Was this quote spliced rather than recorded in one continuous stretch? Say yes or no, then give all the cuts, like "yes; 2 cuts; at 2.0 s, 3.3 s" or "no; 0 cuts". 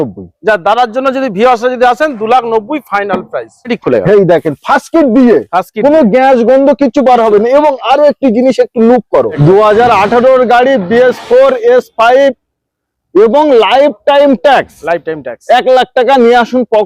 yes; 2 cuts; at 3.7 s, 9.3 s